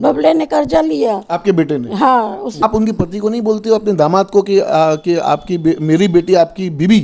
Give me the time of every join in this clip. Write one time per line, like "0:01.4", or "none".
0:02.6